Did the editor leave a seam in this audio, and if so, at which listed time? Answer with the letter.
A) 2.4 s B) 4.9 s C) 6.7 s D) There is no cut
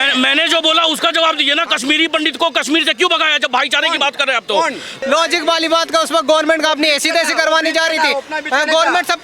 B